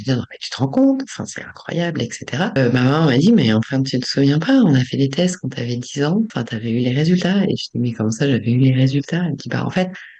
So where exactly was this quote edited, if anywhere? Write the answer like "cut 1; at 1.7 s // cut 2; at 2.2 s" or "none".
cut 1; at 2.6 s // cut 2; at 6.3 s

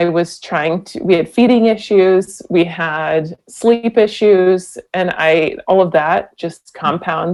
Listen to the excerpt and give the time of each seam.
none

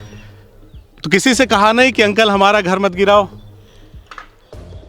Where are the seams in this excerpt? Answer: cut 1; at 1.0 s // cut 2; at 3.4 s

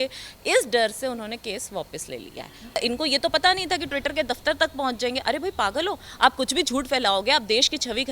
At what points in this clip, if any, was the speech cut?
cut 1; at 2.8 s

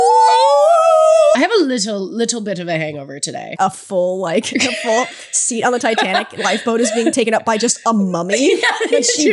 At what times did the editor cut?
cut 1; at 1.4 s // cut 2; at 3.5 s

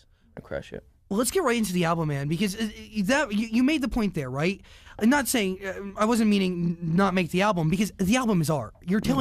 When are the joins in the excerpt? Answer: cut 1; at 7.7 s

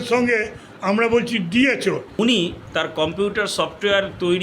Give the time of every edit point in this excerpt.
cut 1; at 2.1 s // cut 2; at 2.6 s

